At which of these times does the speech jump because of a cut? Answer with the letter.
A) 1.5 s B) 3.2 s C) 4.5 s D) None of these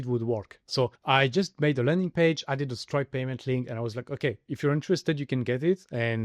D